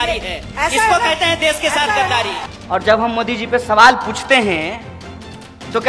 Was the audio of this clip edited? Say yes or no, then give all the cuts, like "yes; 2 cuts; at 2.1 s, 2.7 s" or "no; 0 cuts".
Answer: yes; 1 cut; at 2.5 s